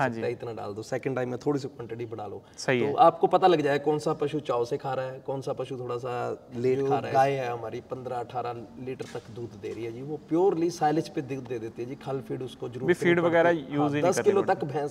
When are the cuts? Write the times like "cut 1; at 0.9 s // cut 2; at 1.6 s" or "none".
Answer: cut 1; at 6.8 s